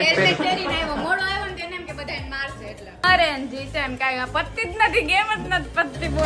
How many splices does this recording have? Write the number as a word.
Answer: one